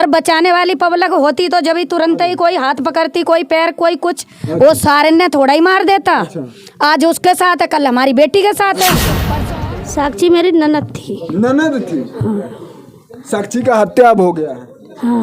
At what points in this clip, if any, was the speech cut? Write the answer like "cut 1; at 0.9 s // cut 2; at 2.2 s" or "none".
cut 1; at 9.2 s